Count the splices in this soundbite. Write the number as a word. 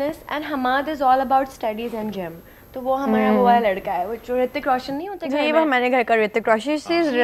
zero